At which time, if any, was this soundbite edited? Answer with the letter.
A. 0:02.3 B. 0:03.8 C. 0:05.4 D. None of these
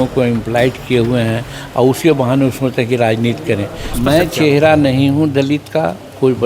B